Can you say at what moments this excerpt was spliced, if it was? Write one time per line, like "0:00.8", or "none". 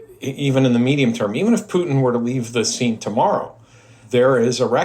0:04.0